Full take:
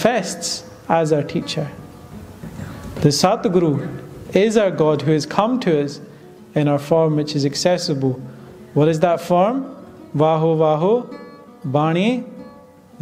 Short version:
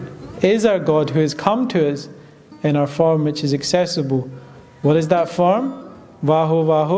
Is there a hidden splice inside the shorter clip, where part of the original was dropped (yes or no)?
no